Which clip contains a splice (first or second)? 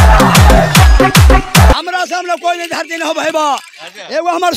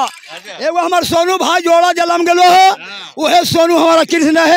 first